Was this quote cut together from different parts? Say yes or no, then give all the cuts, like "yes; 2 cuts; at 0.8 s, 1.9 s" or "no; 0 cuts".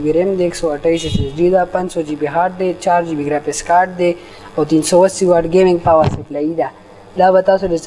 no; 0 cuts